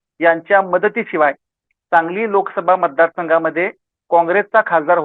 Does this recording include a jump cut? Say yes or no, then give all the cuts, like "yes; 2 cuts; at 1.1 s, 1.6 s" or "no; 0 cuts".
no; 0 cuts